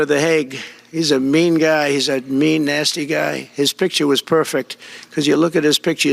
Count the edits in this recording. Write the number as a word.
zero